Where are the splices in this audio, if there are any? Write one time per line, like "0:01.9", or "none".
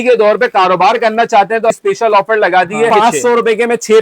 0:01.7
0:02.9